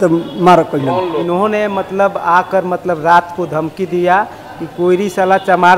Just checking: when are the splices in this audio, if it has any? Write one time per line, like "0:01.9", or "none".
0:01.2